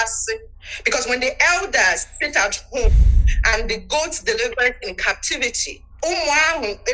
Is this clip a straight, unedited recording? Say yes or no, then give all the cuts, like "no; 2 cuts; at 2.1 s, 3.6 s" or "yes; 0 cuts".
no; 1 cut; at 5.9 s